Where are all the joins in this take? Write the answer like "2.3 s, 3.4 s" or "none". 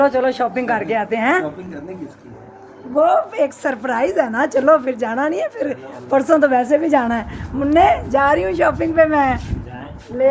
none